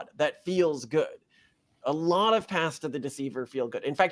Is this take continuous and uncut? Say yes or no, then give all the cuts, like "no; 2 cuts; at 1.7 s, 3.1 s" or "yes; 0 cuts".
no; 1 cut; at 1.7 s